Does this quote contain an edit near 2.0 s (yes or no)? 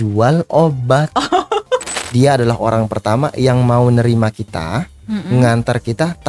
yes